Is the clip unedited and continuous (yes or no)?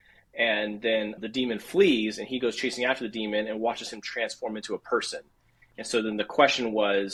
yes